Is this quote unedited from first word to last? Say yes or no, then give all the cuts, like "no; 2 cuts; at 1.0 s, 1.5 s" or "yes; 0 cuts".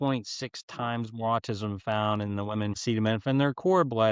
no; 1 cut; at 2.8 s